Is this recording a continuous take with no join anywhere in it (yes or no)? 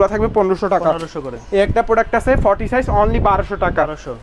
yes